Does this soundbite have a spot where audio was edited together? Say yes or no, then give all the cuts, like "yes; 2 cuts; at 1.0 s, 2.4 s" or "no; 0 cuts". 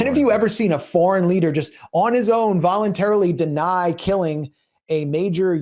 no; 0 cuts